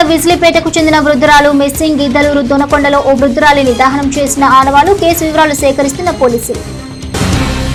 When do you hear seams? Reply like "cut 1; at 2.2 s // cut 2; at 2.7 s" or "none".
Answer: none